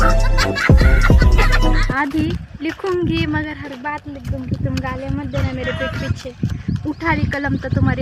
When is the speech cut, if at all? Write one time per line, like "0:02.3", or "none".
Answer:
0:01.8